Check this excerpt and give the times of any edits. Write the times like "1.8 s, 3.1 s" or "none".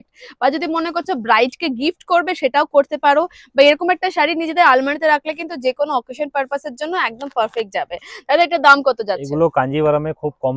none